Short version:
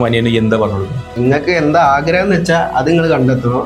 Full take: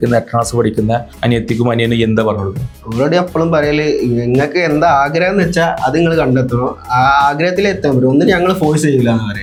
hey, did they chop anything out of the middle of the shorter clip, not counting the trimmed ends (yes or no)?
yes